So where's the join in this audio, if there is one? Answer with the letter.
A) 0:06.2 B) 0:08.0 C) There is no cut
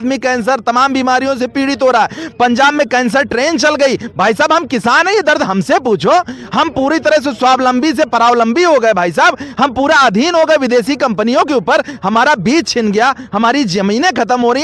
C